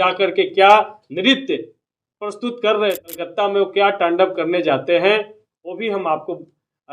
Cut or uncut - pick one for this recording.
cut